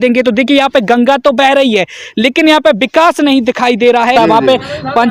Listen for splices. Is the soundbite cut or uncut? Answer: cut